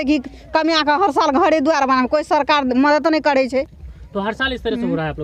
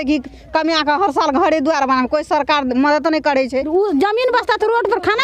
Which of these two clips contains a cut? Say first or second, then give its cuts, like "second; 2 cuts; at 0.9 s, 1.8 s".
second; 1 cut; at 3.7 s